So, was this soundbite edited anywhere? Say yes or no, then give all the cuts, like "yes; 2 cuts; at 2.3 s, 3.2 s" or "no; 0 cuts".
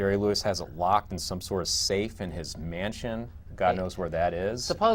no; 0 cuts